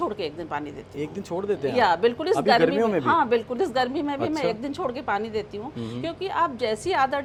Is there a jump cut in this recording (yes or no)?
no